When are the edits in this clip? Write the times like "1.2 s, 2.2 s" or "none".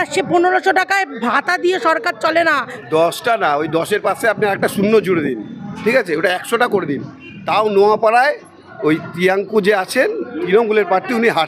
2.7 s